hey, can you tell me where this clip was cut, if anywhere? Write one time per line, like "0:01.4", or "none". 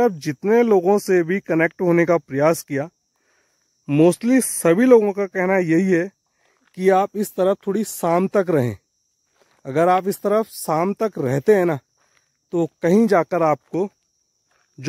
none